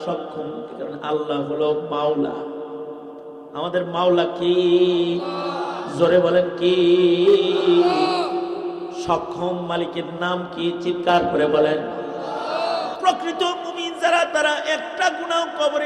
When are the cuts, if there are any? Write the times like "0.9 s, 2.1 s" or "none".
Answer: 13.0 s